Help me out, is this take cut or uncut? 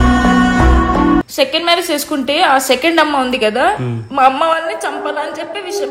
cut